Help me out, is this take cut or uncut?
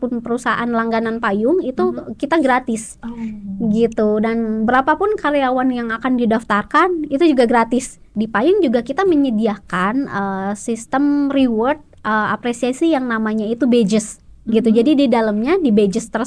cut